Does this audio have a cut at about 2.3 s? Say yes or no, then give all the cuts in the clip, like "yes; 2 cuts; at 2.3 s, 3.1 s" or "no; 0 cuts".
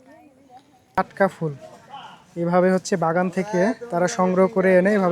no; 1 cut; at 1.0 s